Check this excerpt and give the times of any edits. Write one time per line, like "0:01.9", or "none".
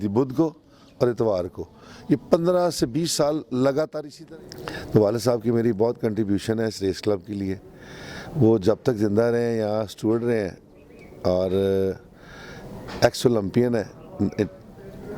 0:04.1